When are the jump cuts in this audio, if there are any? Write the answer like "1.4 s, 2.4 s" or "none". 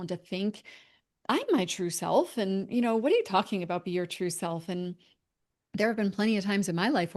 none